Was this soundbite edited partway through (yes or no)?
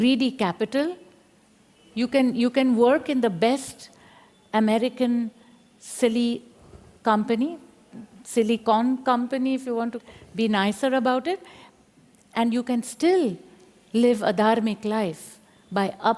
no